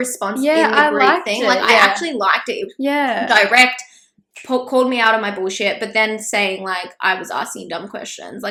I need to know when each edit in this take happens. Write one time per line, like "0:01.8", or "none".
none